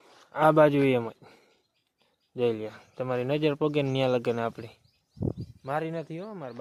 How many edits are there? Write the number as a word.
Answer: zero